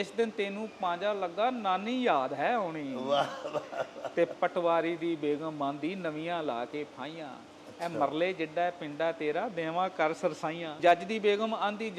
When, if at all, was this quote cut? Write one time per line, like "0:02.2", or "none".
0:10.8